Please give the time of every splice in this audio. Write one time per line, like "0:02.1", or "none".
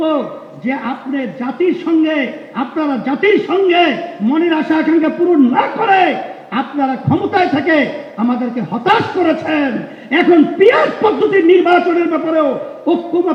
none